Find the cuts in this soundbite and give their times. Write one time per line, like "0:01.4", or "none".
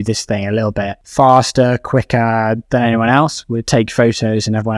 0:01.0

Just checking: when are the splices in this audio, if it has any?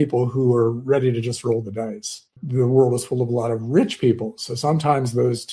0:02.2

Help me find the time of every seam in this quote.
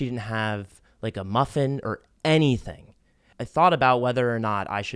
none

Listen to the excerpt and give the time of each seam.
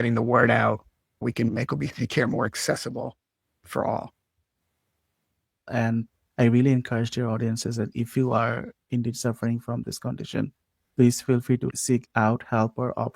0:05.6

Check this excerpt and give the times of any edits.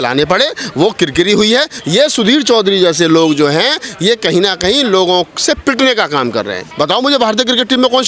0:01.7
0:06.6

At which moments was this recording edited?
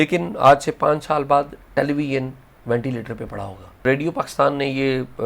0:03.8

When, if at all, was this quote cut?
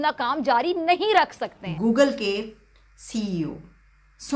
0:01.6

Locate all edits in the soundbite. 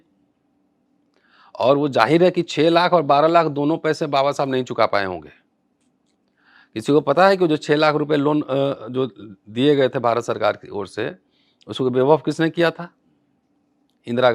none

